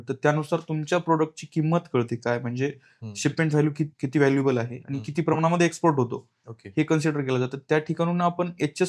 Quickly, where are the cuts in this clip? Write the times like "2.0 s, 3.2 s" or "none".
4.0 s